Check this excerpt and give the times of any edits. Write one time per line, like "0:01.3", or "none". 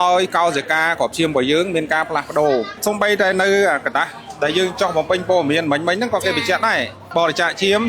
0:02.8
0:06.9